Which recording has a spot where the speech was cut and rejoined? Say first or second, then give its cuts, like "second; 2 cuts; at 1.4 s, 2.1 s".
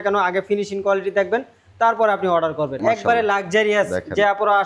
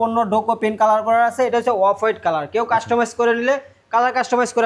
first; 1 cut; at 2.8 s